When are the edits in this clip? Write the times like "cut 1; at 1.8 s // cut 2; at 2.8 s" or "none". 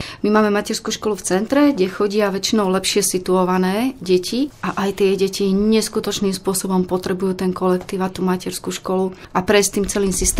cut 1; at 4.6 s